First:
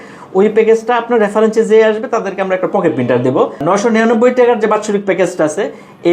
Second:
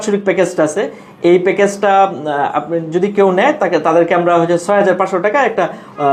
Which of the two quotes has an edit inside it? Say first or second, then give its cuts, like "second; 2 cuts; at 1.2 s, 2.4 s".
first; 1 cut; at 3.6 s